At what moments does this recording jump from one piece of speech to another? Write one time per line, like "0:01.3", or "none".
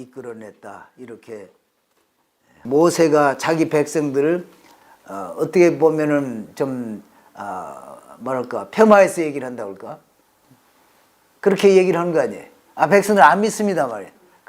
0:02.6

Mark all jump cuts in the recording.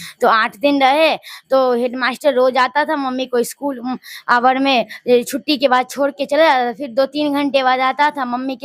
none

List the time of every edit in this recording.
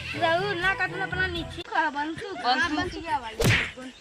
0:01.7

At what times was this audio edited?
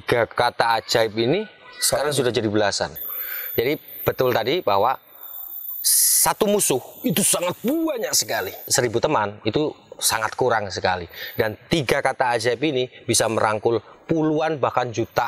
0:03.0
0:08.6

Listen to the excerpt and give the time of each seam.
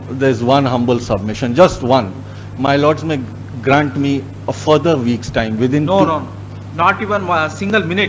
none

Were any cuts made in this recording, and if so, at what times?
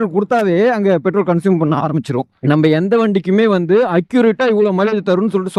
none

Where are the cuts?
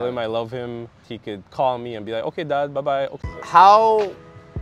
0:03.2

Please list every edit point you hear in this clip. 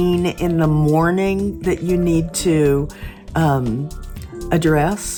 none

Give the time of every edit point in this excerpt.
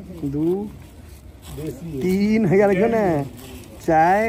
none

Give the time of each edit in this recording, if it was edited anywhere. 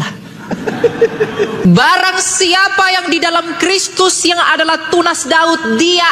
0:01.7

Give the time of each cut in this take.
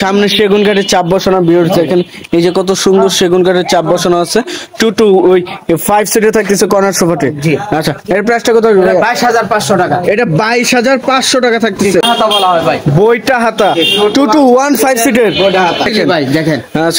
0:12.1
0:15.9

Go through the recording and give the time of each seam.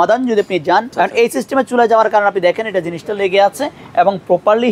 0:00.9

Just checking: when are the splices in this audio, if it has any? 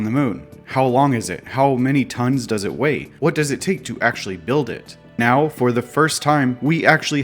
0:05.2

